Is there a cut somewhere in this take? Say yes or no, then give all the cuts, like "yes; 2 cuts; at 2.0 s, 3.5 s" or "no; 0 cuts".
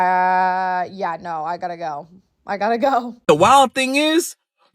yes; 1 cut; at 3.1 s